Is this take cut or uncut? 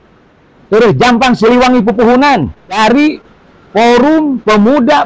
cut